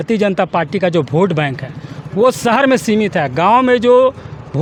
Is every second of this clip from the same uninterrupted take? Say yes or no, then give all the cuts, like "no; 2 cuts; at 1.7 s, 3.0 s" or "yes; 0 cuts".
yes; 0 cuts